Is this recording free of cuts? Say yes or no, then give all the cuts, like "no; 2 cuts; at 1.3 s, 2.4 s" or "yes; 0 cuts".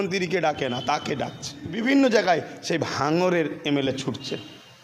no; 1 cut; at 1.7 s